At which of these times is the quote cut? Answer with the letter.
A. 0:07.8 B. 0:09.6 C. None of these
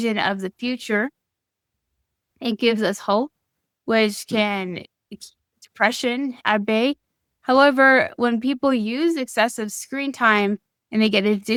C